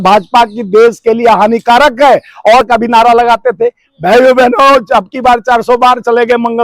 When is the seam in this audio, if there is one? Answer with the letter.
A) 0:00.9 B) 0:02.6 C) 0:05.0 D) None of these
B